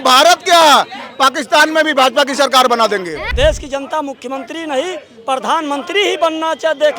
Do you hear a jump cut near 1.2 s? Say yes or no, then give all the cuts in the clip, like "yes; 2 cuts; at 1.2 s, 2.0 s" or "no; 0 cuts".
no; 1 cut; at 3.2 s